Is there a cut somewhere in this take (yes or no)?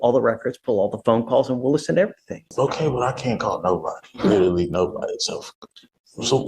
yes